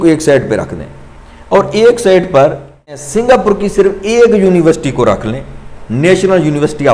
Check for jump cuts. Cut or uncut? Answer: cut